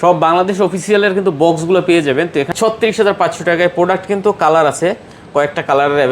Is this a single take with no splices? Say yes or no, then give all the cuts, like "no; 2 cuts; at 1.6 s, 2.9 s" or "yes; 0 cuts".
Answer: no; 1 cut; at 2.5 s